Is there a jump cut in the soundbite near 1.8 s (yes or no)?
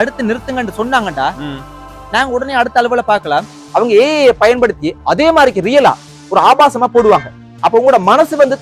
no